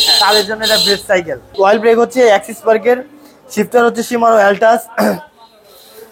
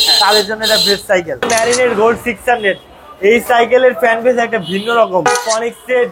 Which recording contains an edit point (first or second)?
second